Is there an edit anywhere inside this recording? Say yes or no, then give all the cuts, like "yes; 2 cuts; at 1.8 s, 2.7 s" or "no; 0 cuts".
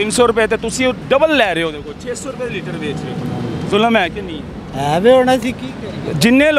no; 0 cuts